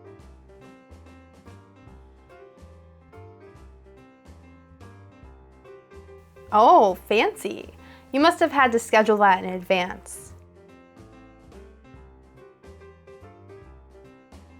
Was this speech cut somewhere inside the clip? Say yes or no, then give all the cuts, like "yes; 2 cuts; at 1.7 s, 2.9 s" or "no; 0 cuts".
no; 0 cuts